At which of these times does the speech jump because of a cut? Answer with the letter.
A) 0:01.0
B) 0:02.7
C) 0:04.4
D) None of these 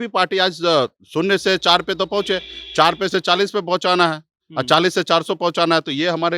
D